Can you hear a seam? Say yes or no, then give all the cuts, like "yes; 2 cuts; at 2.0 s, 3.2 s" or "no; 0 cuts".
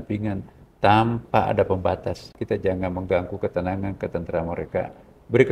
yes; 1 cut; at 2.4 s